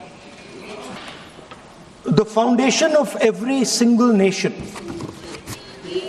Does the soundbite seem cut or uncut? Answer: cut